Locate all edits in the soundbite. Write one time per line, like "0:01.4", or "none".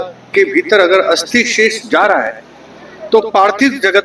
none